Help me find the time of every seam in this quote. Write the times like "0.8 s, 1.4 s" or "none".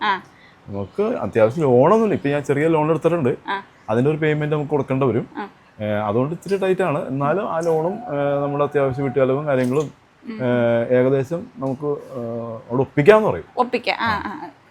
none